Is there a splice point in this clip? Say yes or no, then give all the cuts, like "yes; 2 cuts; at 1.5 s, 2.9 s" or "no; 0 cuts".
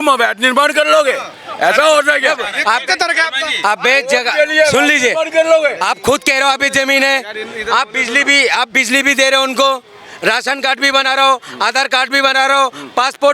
no; 0 cuts